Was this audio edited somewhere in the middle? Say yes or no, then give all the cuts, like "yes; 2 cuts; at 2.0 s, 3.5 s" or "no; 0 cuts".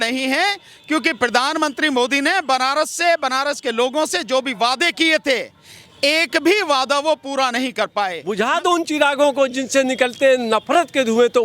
yes; 1 cut; at 8.2 s